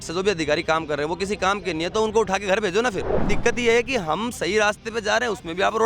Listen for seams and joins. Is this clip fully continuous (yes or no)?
no